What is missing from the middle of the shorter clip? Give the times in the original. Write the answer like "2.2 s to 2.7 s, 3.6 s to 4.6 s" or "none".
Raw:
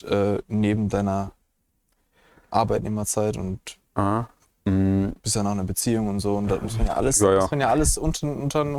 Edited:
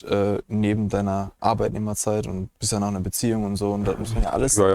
1.3 s to 2.4 s, 3.7 s to 5.2 s